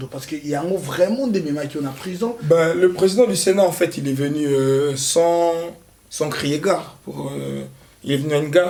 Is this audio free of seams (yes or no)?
yes